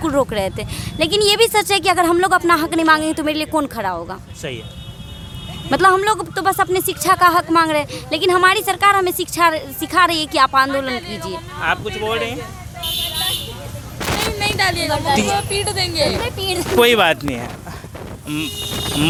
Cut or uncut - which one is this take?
uncut